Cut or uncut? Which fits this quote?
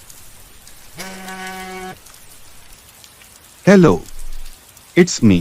uncut